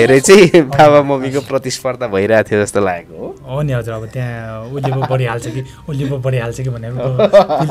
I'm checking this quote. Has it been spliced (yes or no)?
no